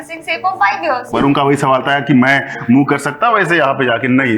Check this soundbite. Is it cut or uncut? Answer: cut